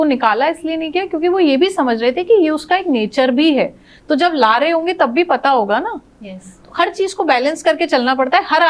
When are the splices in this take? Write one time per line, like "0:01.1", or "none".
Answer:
none